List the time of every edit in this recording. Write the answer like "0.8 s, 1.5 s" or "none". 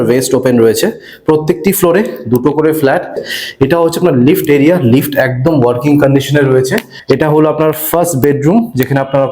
3.2 s, 6.9 s

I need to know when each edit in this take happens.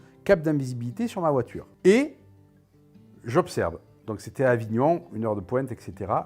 1.6 s

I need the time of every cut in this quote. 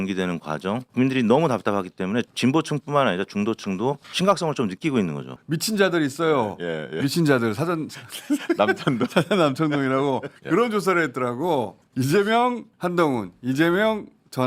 0.8 s, 2.3 s, 4.1 s, 5.4 s, 10.3 s, 11.8 s, 12.7 s

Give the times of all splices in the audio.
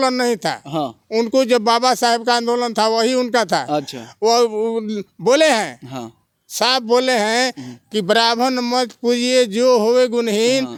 none

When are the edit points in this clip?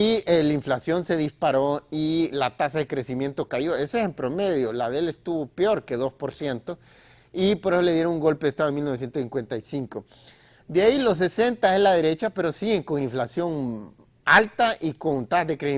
none

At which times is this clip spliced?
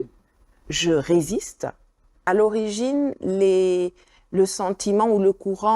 2.2 s

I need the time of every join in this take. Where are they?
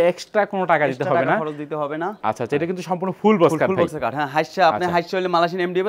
none

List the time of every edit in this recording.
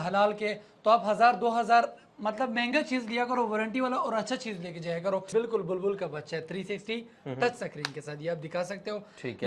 5.3 s

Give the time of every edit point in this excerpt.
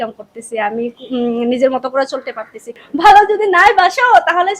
2.8 s

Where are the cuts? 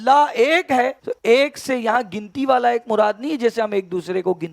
1.1 s

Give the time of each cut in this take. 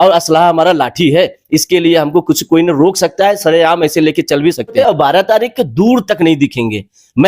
4.7 s

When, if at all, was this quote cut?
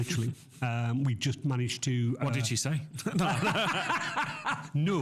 none

